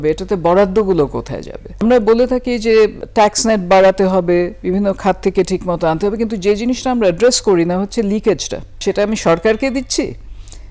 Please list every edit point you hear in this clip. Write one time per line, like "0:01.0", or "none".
0:01.8
0:03.0
0:08.7